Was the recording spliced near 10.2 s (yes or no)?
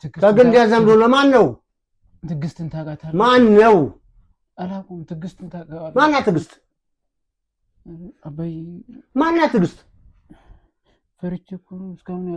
no